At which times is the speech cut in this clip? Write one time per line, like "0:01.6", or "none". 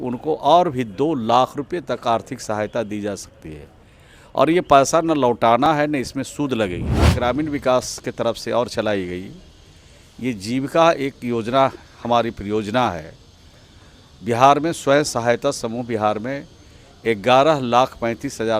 0:07.1